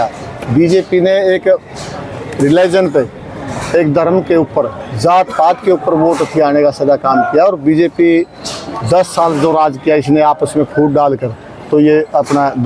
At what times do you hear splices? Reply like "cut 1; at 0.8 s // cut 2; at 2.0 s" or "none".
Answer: none